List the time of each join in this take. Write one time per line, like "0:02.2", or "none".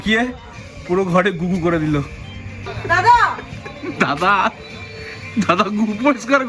0:02.8